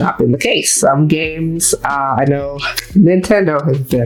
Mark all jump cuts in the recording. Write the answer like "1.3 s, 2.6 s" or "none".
none